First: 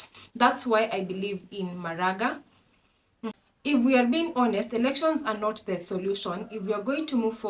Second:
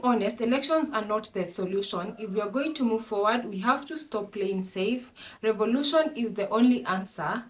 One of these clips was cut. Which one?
first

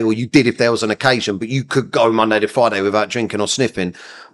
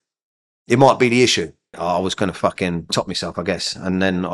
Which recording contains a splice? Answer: second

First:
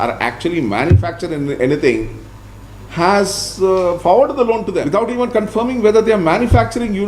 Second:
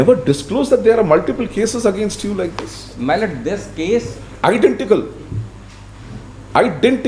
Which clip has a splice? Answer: first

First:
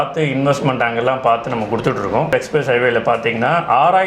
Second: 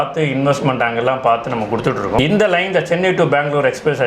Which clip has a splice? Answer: first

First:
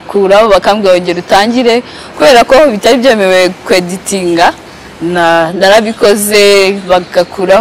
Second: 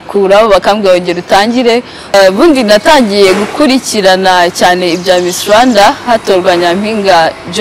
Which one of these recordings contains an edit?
second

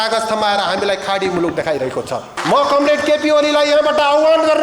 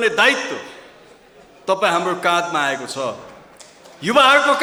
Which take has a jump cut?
first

